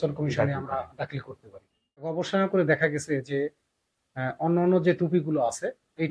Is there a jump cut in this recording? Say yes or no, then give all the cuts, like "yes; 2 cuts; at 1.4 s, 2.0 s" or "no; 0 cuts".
yes; 1 cut; at 2.1 s